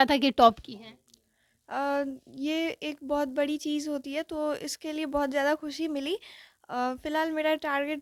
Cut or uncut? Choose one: uncut